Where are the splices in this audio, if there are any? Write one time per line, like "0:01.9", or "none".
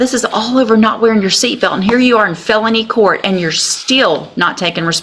none